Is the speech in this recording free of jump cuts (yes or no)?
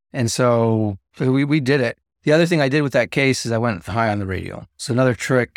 no